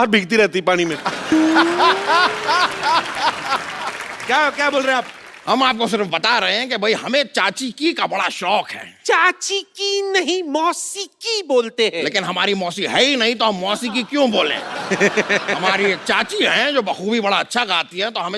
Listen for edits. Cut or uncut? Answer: uncut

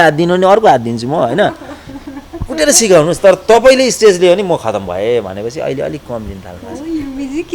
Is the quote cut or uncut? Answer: uncut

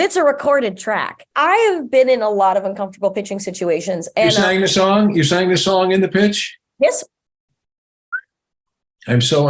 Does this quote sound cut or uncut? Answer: cut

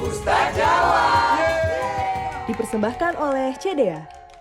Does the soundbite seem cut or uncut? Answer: uncut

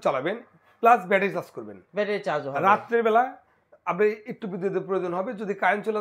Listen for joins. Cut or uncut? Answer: uncut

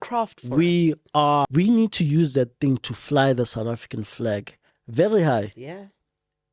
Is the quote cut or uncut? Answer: cut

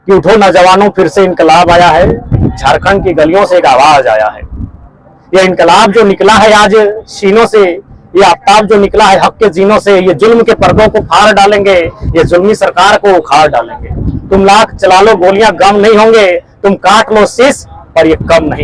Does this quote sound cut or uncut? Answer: uncut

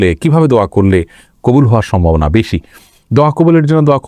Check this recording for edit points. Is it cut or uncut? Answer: uncut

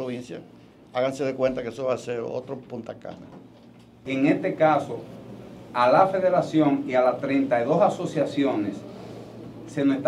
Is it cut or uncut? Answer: cut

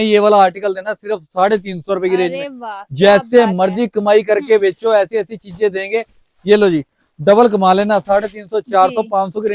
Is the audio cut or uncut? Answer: uncut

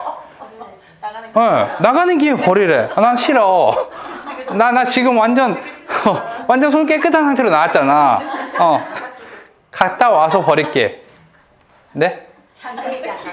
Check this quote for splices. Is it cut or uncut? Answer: uncut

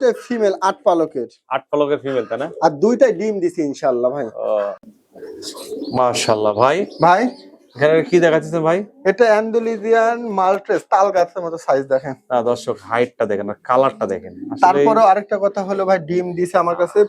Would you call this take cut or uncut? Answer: cut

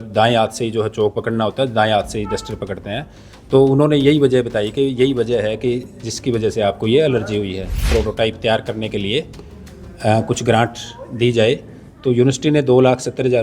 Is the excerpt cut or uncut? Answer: cut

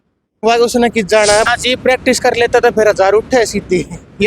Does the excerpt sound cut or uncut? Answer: cut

